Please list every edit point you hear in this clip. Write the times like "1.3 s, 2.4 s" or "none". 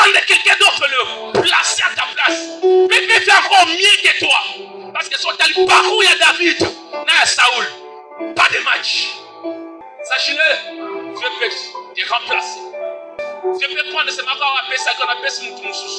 9.9 s, 11.2 s, 13.2 s

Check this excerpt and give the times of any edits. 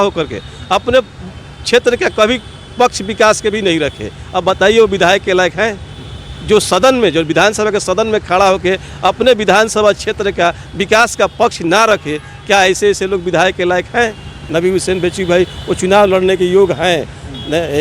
14.4 s

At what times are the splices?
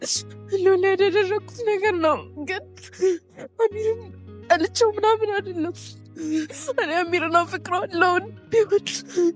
none

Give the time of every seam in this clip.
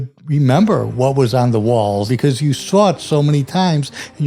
2.1 s

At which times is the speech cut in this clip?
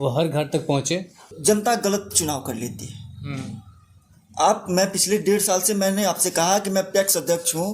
1.2 s

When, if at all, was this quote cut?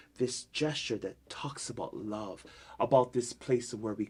none

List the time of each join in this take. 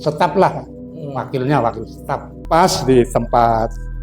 2.3 s

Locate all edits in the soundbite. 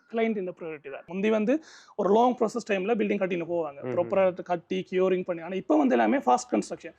1.0 s

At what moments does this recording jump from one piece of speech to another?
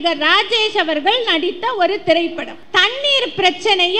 2.5 s

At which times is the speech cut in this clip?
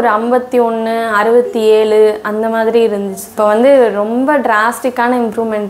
3.2 s

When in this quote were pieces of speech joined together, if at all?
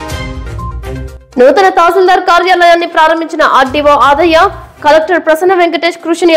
1.0 s

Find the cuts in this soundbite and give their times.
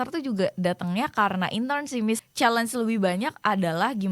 2.2 s

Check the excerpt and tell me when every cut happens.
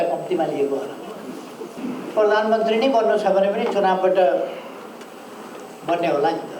1.7 s

